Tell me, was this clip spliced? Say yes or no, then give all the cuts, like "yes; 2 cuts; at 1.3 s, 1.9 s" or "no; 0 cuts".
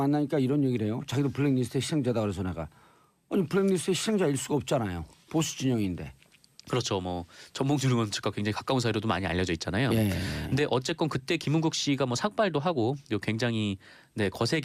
no; 0 cuts